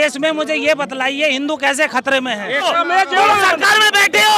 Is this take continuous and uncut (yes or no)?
no